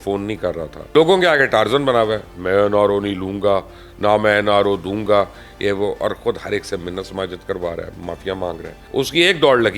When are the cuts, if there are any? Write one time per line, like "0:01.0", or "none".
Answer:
0:00.9
0:08.7